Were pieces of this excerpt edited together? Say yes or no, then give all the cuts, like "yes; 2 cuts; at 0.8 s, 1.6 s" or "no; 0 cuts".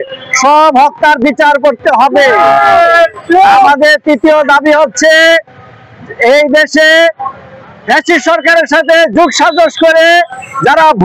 no; 0 cuts